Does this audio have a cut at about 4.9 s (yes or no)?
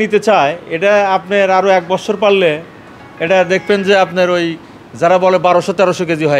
no